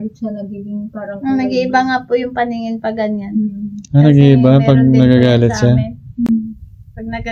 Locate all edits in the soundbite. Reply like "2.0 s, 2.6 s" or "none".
none